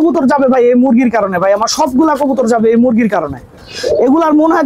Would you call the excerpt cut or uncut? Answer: uncut